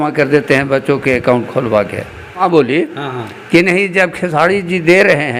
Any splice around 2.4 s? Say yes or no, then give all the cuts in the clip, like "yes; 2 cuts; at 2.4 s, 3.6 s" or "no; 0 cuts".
yes; 1 cut; at 2.4 s